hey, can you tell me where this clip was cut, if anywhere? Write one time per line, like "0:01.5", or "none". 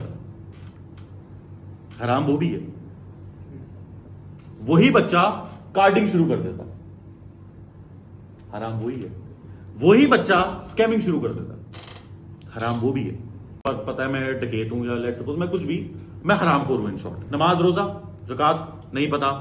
0:13.7
0:17.2